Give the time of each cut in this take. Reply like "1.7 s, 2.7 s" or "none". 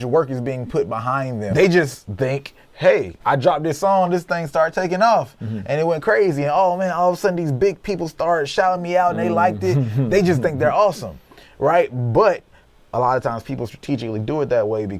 1.5 s, 3.2 s